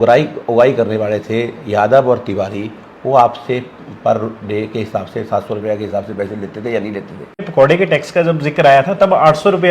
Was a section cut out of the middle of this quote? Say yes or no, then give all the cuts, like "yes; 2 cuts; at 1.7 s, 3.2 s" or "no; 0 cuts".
yes; 1 cut; at 7.5 s